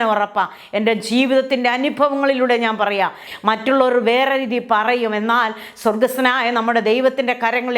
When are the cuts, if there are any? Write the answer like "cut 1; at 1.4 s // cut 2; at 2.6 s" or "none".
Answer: cut 1; at 3.3 s